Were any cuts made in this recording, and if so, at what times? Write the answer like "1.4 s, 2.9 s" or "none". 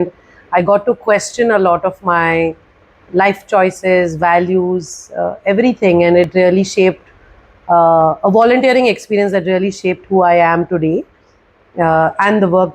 none